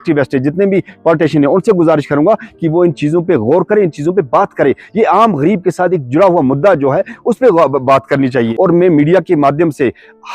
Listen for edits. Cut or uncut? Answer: cut